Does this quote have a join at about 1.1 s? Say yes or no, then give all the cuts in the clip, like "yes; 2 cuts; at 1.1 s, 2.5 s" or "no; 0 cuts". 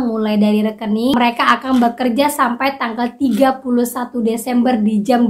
yes; 1 cut; at 1.1 s